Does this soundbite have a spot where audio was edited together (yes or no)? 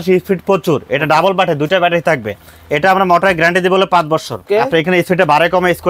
yes